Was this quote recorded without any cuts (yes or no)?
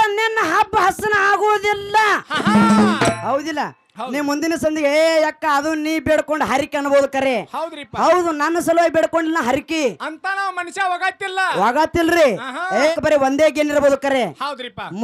no